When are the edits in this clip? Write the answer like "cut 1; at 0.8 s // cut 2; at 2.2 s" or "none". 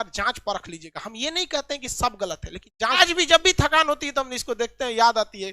cut 1; at 3.0 s